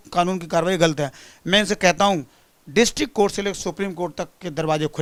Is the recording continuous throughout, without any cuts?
yes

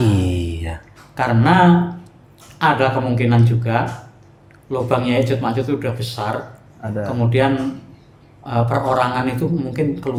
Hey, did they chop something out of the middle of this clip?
no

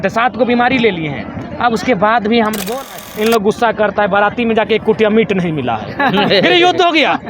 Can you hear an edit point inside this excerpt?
yes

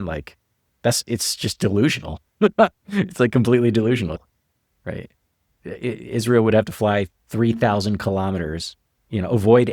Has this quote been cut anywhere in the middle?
yes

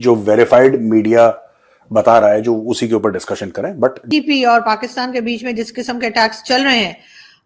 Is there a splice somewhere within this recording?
yes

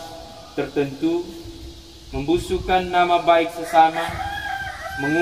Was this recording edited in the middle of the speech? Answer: no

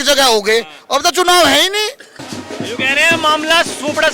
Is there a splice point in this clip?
yes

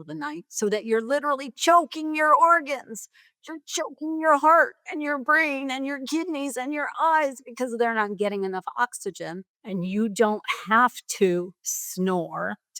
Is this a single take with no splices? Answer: no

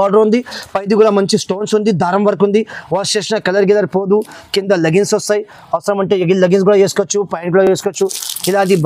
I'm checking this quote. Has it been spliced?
no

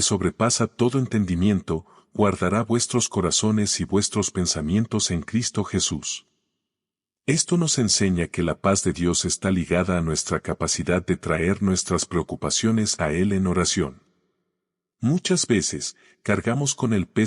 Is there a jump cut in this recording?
yes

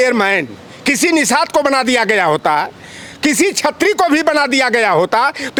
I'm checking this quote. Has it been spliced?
no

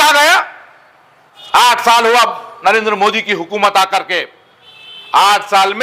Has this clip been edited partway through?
yes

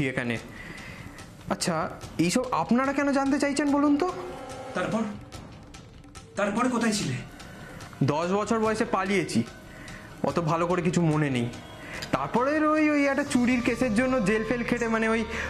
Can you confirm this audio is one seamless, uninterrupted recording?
yes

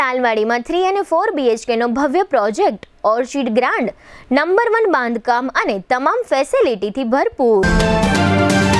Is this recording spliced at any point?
yes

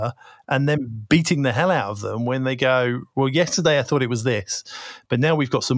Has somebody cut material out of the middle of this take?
no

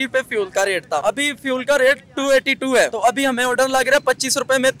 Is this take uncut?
no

